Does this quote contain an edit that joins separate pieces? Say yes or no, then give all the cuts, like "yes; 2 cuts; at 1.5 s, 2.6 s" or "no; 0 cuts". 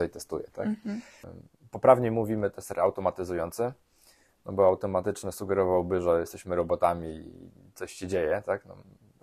yes; 1 cut; at 1.3 s